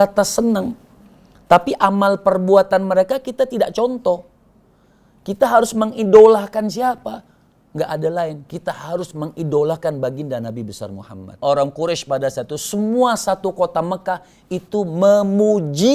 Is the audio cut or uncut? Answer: cut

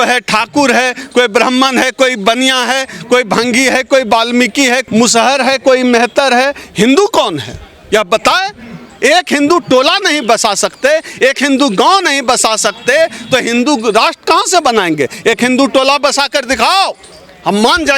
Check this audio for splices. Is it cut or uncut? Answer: uncut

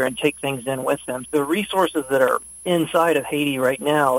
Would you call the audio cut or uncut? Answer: cut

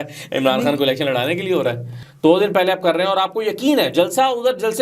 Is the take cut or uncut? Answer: cut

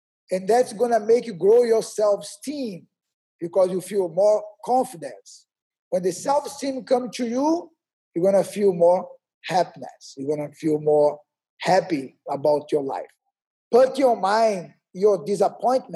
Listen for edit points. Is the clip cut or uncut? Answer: cut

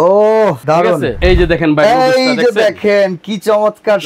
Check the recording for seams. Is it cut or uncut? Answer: cut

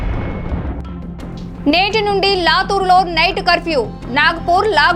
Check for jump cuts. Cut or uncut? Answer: cut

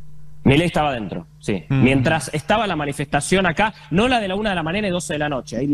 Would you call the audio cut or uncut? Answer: uncut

